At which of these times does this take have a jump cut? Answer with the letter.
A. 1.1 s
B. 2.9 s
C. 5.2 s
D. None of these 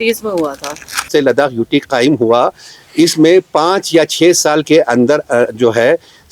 A